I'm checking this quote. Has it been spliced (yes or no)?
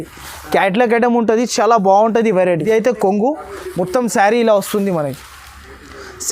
yes